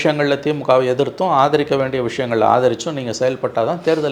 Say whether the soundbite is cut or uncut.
uncut